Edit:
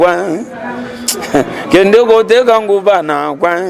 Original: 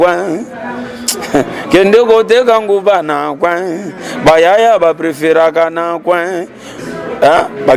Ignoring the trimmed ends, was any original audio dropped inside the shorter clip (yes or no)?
no